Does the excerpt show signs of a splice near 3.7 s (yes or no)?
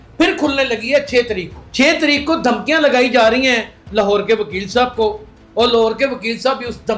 no